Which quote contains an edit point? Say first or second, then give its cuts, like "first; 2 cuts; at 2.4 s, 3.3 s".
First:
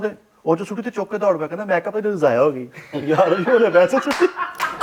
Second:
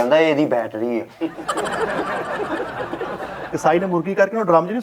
second; 1 cut; at 3.5 s